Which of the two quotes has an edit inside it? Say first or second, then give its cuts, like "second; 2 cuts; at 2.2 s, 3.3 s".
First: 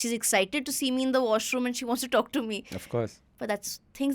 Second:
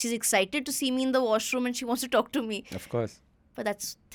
first; 1 cut; at 3.3 s